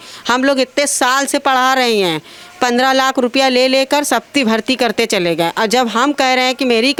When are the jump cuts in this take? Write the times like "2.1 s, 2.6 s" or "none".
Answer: none